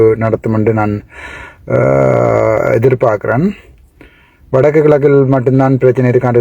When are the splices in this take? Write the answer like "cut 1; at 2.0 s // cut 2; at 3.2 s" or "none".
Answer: none